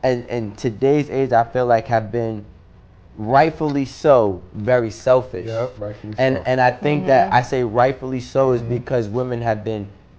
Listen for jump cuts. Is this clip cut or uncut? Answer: uncut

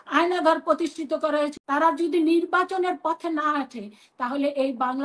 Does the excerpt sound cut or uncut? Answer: cut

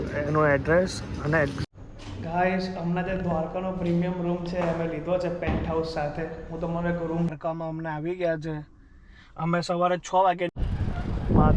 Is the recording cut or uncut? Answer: cut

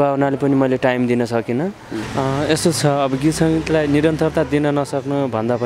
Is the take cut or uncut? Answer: cut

